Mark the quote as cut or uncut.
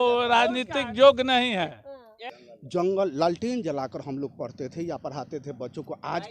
cut